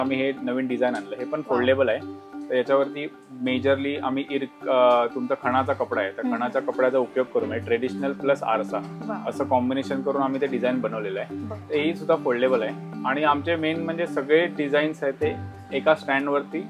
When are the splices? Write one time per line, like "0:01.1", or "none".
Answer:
none